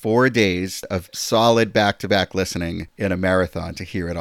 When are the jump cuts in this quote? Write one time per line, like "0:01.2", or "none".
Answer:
0:01.0
0:02.9

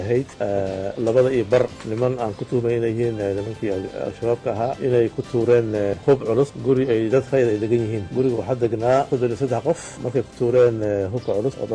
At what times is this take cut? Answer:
0:01.8
0:06.0
0:10.0

